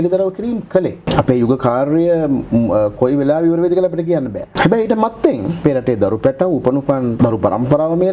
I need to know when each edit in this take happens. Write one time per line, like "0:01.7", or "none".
0:01.0
0:04.5
0:05.6
0:07.1